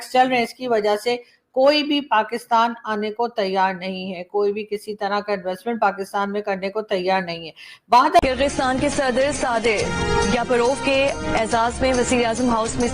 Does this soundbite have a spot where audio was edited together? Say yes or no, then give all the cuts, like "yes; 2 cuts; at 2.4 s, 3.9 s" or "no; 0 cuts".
yes; 1 cut; at 8.2 s